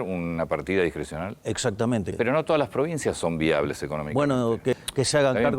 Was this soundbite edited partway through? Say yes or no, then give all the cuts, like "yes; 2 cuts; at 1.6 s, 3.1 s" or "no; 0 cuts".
yes; 2 cuts; at 2.1 s, 4.7 s